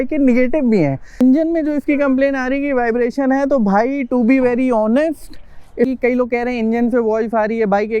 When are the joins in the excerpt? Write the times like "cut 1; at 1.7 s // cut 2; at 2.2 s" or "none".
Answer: cut 1; at 1.2 s // cut 2; at 5.9 s